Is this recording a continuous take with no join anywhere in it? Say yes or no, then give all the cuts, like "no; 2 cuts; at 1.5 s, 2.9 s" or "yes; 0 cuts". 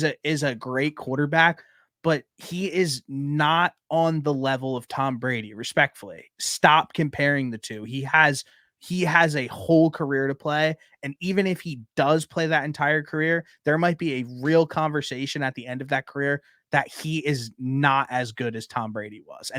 yes; 0 cuts